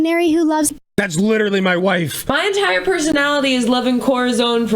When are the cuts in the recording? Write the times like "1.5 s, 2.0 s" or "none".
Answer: 2.2 s, 3.1 s